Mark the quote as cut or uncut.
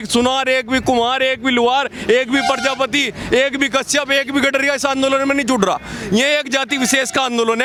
uncut